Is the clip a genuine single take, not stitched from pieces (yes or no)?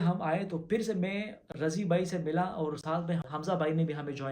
no